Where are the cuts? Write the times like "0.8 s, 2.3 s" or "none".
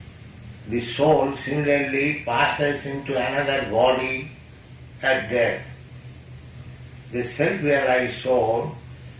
7.0 s